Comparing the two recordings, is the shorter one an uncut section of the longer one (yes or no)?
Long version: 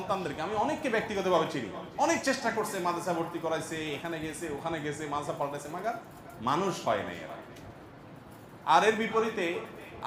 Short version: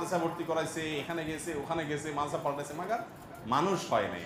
yes